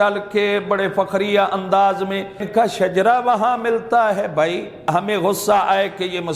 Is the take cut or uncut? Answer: cut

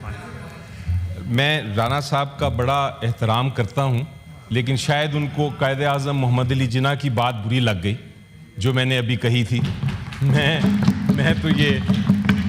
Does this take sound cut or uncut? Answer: uncut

